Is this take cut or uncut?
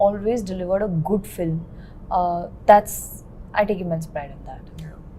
uncut